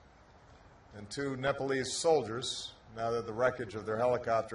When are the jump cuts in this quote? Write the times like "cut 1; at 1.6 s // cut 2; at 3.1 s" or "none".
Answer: cut 1; at 1.3 s

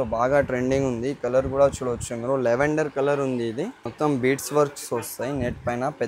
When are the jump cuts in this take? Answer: cut 1; at 3.9 s

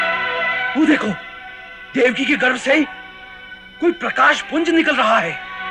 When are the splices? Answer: none

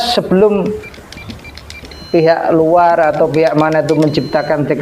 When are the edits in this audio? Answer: none

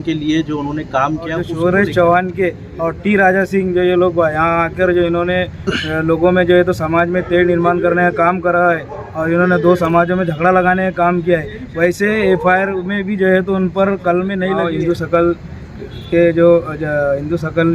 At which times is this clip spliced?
cut 1; at 1.4 s // cut 2; at 14.6 s

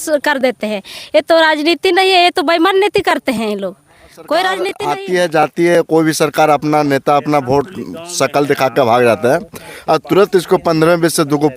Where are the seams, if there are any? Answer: cut 1; at 4.8 s

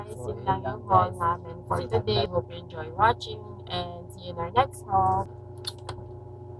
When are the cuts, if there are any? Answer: cut 1; at 2.3 s // cut 2; at 5.3 s

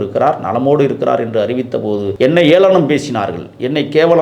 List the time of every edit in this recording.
cut 1; at 2.1 s

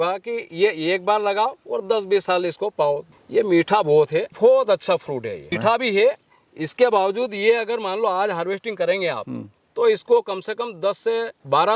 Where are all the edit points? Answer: cut 1; at 3.1 s

